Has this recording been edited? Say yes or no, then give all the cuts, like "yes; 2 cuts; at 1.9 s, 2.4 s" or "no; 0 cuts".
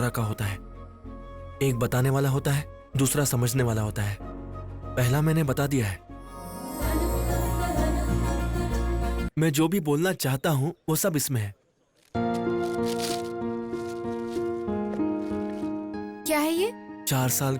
yes; 2 cuts; at 6.5 s, 9.3 s